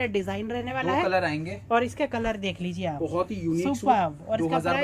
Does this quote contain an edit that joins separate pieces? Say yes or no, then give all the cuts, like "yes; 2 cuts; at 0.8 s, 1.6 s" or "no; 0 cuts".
no; 0 cuts